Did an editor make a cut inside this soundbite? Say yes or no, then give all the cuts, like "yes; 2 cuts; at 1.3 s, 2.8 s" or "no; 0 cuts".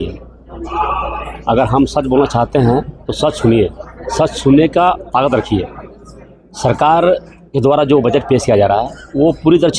no; 0 cuts